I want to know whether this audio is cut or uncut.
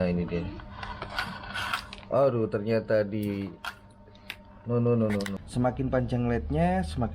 cut